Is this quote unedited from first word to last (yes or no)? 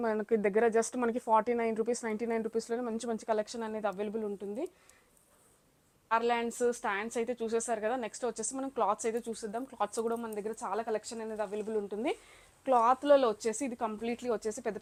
yes